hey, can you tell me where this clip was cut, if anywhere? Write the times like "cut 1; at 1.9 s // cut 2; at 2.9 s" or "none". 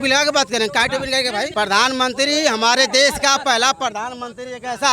cut 1; at 1.5 s